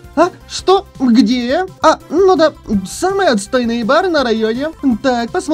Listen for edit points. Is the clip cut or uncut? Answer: cut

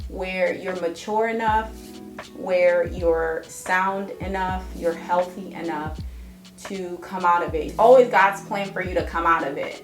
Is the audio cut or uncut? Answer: cut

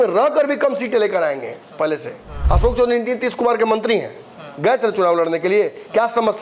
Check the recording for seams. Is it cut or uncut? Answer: cut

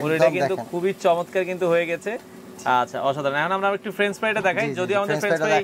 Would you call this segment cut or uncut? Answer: uncut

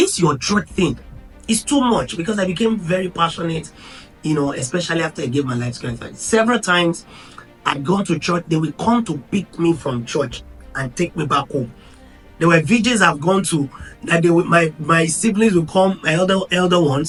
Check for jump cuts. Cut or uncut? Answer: uncut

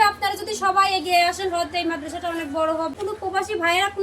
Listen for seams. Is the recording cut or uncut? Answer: cut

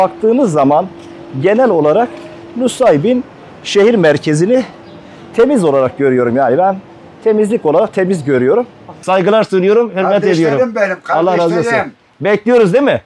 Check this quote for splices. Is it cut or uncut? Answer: cut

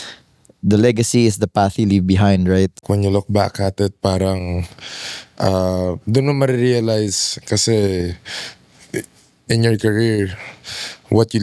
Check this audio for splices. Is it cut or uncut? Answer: cut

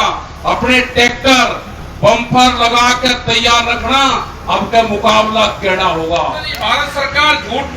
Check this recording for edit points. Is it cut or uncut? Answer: cut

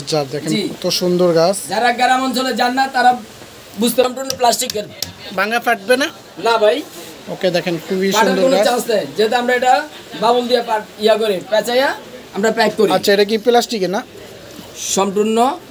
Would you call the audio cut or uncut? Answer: cut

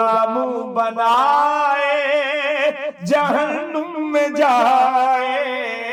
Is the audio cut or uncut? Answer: uncut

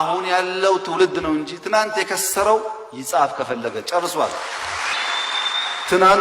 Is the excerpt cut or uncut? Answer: cut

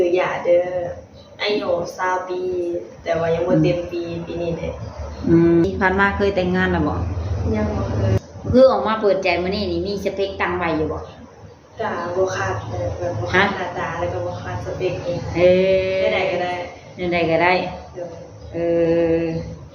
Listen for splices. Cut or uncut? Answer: cut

